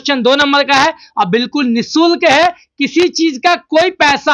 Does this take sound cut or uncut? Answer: uncut